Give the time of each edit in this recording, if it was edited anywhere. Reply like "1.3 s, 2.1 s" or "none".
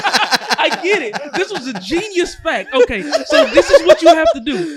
none